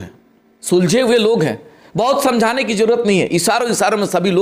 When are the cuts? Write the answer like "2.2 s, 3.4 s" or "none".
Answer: none